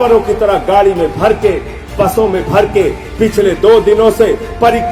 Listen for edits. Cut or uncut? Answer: uncut